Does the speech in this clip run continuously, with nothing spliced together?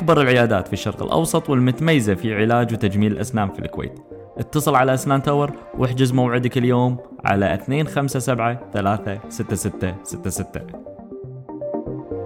no; 1 cut; at 10.6 s

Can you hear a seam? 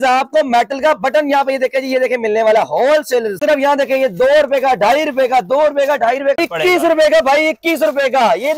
yes; 2 cuts; at 3.4 s, 6.4 s

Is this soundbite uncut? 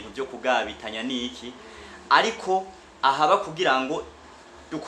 yes; 0 cuts

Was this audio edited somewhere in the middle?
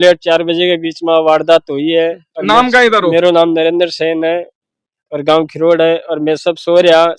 no; 0 cuts

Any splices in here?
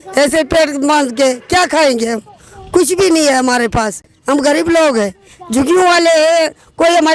no; 0 cuts

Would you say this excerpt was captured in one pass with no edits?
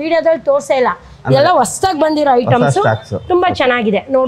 yes; 0 cuts

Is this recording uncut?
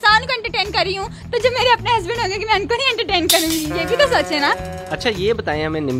no; 1 cut; at 4.8 s

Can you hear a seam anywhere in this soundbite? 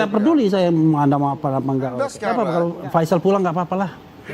yes; 1 cut; at 2.2 s

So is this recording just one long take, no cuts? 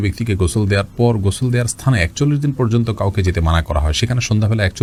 yes; 0 cuts

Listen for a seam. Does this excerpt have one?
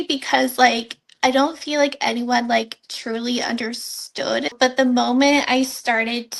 yes; 1 cut; at 4.5 s

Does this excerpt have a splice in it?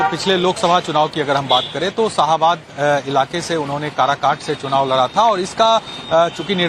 yes; 1 cut; at 2.5 s

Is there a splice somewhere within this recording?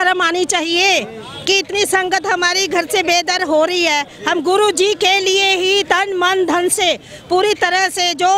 no; 0 cuts

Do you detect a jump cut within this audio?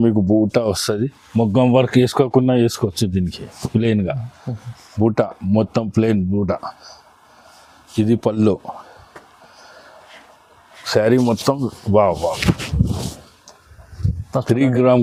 no; 0 cuts

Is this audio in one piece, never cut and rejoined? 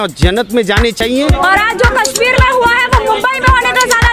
no; 1 cut; at 1.1 s

